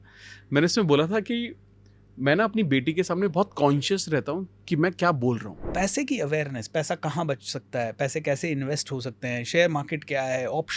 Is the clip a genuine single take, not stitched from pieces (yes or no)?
no